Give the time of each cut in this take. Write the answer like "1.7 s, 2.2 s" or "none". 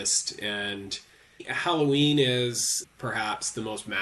1.5 s, 2.8 s